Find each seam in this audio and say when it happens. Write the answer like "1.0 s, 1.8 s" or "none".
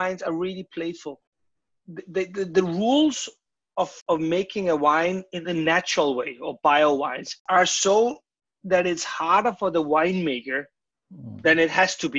1.3 s, 4.0 s, 7.4 s